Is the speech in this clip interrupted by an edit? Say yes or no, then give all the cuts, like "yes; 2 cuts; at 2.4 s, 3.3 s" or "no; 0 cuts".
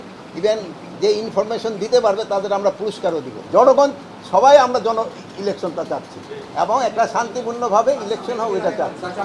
yes; 1 cut; at 3.4 s